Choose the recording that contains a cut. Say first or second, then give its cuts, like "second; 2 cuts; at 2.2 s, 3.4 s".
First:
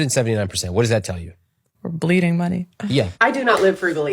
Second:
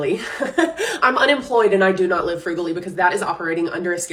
first; 1 cut; at 3.1 s